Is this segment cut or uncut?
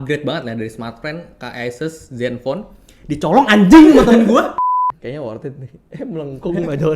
cut